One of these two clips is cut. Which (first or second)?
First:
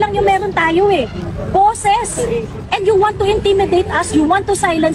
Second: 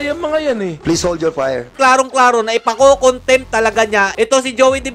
second